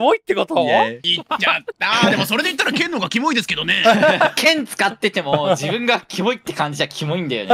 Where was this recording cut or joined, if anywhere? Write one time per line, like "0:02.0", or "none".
0:01.1
0:04.3